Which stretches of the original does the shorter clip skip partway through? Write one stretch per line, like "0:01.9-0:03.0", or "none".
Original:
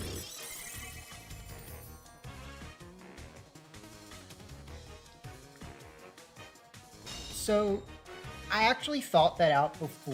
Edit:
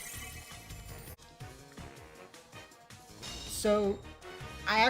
0:01.8-0:05.0